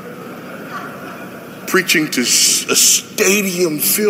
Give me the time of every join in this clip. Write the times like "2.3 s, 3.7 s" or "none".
none